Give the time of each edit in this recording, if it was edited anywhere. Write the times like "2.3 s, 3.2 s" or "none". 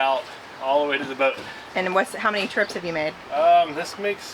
none